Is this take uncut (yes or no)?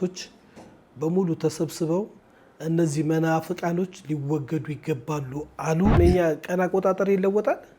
no